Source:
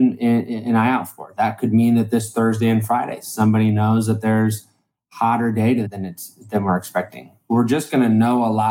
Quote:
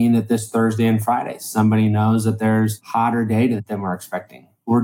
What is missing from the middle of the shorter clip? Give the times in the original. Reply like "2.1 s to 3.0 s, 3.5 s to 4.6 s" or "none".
4.6 s to 5.1 s, 5.9 s to 6.5 s